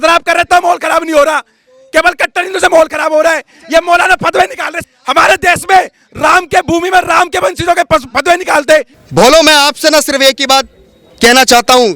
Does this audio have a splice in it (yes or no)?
yes